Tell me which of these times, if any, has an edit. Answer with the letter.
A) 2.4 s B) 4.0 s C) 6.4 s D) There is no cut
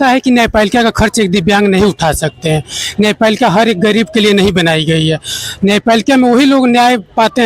D